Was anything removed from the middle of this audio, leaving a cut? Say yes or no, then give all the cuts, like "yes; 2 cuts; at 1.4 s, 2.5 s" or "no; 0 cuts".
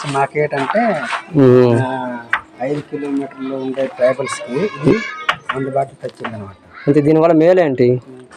no; 0 cuts